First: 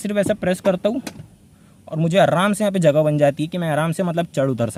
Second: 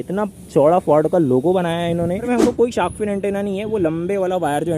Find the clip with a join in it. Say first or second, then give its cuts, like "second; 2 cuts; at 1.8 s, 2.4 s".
second; 1 cut; at 2.3 s